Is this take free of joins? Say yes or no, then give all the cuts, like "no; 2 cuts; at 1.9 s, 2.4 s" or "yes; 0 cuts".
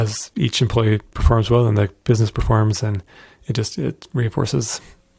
yes; 0 cuts